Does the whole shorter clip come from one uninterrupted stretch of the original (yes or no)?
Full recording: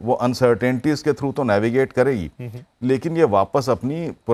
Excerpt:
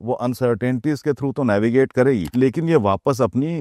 no